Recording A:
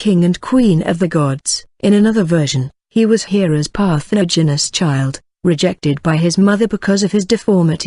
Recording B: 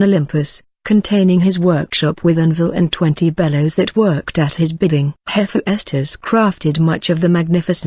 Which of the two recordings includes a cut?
A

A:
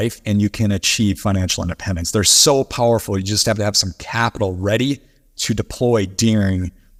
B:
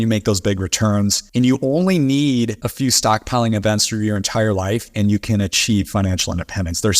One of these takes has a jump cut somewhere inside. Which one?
B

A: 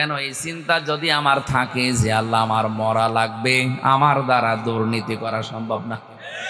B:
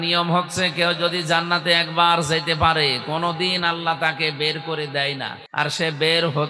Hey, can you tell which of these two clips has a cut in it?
B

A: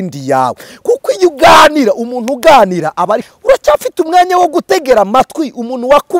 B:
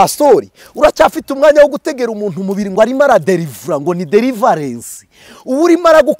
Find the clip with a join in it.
A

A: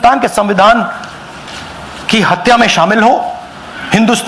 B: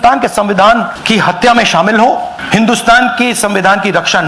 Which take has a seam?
B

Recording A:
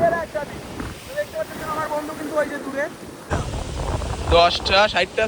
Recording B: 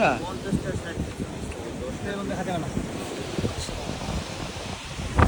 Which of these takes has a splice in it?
A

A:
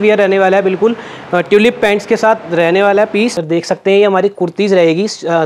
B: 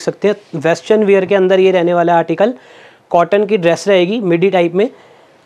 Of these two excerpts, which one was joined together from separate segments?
A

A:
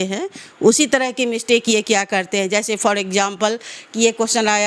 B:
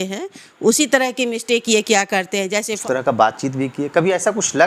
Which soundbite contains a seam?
B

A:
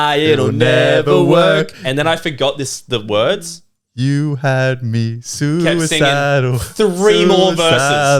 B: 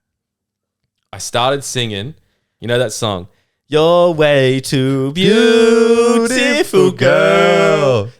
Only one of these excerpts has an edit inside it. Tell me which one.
B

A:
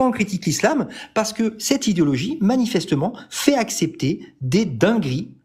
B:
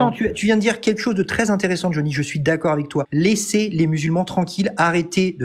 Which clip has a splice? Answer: B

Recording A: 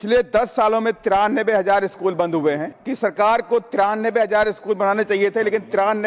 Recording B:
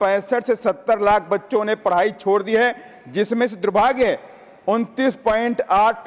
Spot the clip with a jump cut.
A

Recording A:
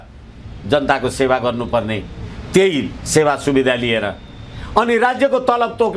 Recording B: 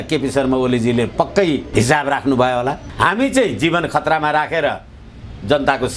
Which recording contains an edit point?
B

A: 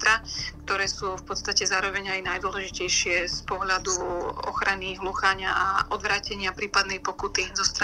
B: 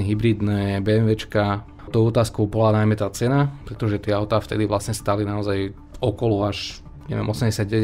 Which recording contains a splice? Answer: B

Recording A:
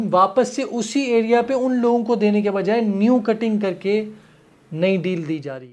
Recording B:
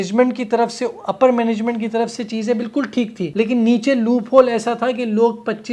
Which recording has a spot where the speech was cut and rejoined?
B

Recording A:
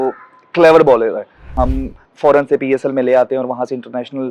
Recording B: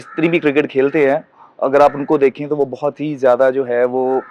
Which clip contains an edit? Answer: A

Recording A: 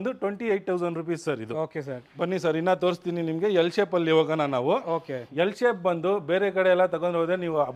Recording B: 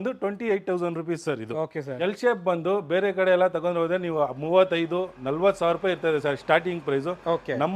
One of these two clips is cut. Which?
B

